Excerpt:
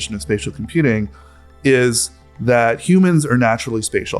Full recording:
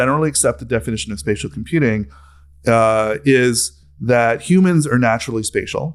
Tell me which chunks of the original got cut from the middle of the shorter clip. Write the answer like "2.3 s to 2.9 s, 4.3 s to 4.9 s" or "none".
2.5 s to 3.2 s